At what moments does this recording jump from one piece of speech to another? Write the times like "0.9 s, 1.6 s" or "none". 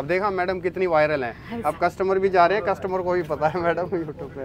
none